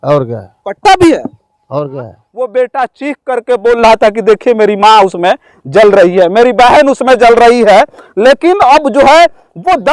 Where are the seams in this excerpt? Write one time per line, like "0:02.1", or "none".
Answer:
0:02.2